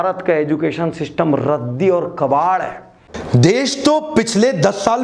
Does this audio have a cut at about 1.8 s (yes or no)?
no